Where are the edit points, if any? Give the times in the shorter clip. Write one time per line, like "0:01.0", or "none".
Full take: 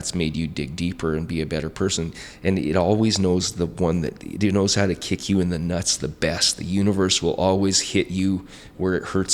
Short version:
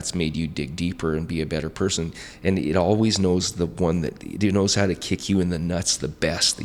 none